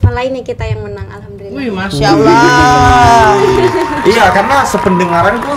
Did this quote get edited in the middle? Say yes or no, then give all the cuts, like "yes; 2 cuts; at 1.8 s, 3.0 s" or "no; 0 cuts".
no; 0 cuts